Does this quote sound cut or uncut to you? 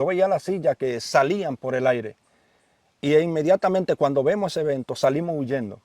uncut